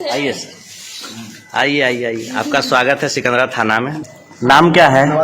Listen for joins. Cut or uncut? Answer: uncut